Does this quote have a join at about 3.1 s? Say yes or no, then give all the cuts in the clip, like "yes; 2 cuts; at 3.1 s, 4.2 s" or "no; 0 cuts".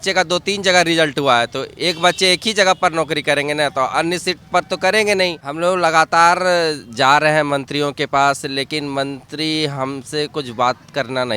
no; 1 cut; at 5.4 s